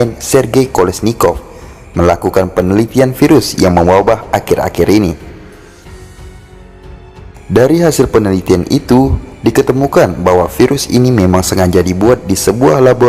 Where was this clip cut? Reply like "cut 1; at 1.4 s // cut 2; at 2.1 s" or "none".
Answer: cut 1; at 5.4 s // cut 2; at 7.4 s